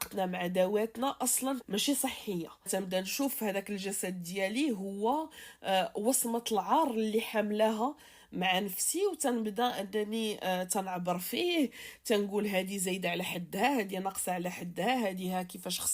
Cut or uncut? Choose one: cut